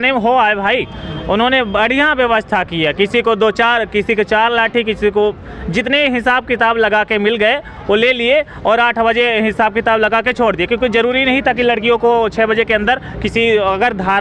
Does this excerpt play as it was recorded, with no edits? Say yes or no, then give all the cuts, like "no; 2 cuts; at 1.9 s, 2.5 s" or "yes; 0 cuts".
yes; 0 cuts